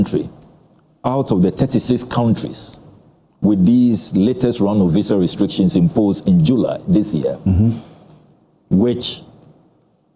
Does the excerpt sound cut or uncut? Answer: uncut